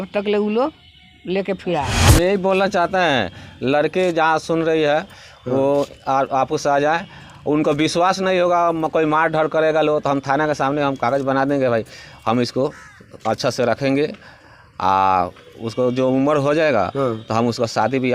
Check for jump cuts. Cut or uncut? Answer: cut